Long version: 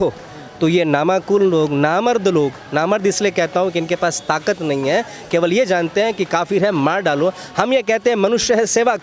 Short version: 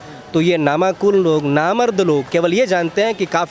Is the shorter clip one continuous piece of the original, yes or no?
no